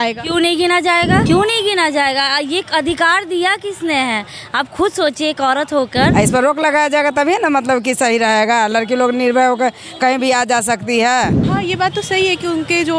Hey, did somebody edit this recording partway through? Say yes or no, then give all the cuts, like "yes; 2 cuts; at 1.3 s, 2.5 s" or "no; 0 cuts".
yes; 3 cuts; at 1.2 s, 6.1 s, 11.5 s